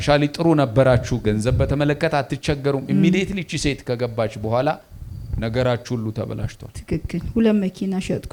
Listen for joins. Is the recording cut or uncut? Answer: uncut